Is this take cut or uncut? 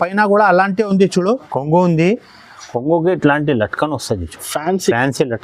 cut